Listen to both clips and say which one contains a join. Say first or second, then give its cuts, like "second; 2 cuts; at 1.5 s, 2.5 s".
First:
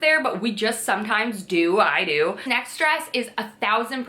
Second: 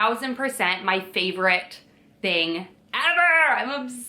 first; 1 cut; at 2.4 s